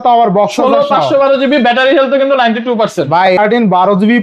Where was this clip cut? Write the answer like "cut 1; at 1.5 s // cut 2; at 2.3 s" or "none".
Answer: cut 1; at 3.3 s